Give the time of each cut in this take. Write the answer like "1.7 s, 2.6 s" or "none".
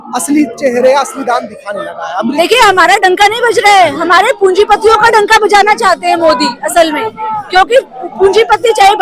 2.3 s